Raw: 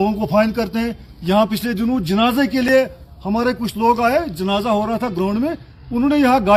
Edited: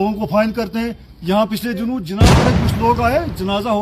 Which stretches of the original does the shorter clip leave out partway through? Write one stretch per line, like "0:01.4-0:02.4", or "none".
0:02.1-0:03.1